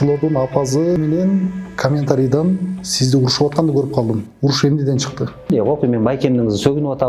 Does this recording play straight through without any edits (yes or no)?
no